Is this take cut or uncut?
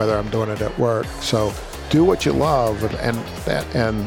uncut